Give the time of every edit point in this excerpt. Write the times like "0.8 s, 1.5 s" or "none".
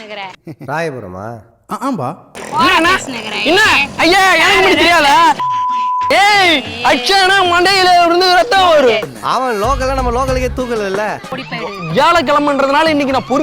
2.5 s, 11.4 s